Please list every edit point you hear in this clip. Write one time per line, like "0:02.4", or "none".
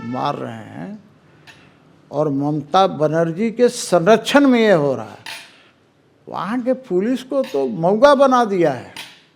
none